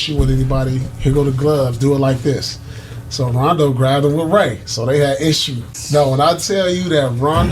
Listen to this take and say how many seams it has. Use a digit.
1